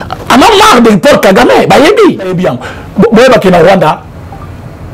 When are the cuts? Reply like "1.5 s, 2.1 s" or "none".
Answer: 2.4 s